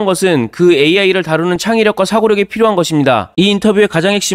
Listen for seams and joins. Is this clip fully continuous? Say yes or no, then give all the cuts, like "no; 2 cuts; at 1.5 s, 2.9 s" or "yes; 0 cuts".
no; 1 cut; at 3.3 s